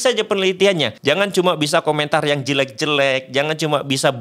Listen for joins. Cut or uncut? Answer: cut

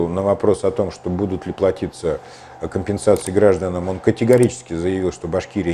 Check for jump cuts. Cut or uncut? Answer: uncut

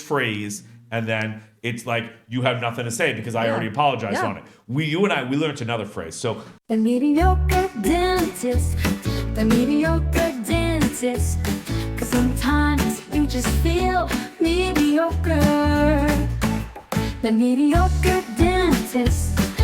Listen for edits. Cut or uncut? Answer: cut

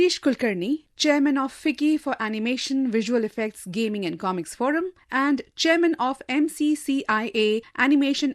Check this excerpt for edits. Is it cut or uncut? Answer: uncut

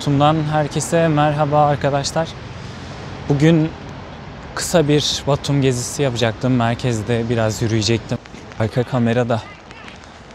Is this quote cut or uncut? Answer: cut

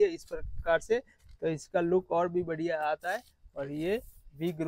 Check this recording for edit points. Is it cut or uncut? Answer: uncut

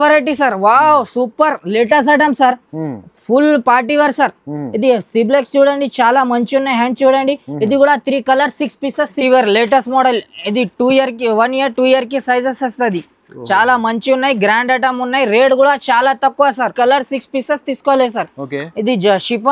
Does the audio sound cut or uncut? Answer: cut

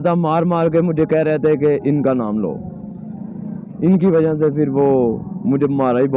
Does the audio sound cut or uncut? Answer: uncut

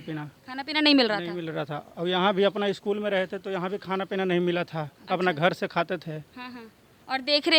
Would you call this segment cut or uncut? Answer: uncut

